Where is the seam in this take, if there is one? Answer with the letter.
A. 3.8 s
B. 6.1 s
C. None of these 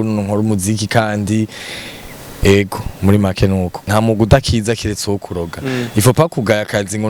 A